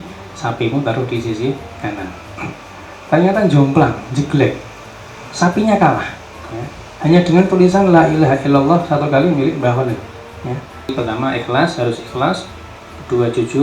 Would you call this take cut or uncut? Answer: cut